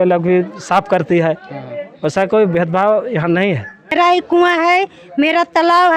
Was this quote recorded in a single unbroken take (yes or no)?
no